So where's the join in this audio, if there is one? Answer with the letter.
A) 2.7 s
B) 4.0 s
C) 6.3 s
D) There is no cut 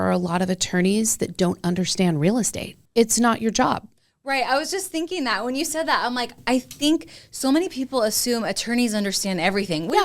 A